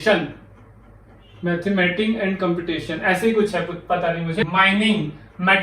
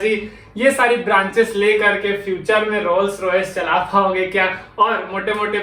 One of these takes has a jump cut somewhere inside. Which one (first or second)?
first